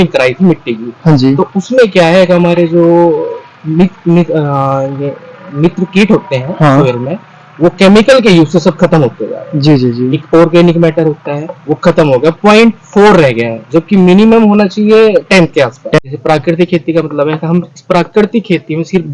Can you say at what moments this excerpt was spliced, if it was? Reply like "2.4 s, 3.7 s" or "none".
16.0 s